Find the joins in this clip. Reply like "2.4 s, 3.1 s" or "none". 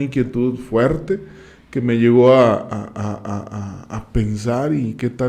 none